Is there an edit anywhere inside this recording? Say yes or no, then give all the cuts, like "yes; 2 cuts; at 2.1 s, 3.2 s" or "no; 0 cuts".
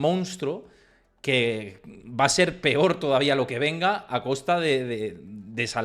no; 0 cuts